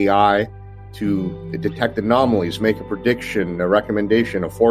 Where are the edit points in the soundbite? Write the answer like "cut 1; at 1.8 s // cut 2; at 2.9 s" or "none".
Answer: none